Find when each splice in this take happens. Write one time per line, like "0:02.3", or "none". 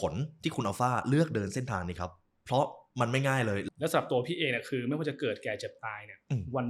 0:03.6